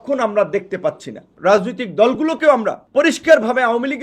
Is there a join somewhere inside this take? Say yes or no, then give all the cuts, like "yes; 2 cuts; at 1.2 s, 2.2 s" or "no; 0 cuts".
yes; 2 cuts; at 1.3 s, 2.8 s